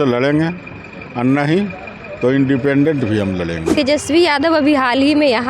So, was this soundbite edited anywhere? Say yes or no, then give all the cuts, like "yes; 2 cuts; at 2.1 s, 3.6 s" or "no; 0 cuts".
yes; 1 cut; at 3.6 s